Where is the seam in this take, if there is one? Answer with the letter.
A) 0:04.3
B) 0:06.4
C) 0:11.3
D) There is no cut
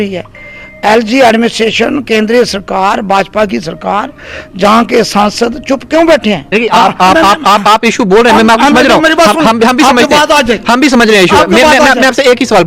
B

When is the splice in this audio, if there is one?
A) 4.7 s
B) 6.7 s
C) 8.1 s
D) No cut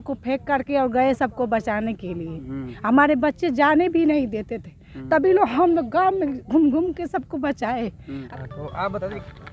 C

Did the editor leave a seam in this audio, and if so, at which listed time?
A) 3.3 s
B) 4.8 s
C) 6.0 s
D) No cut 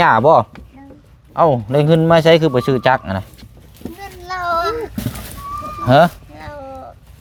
D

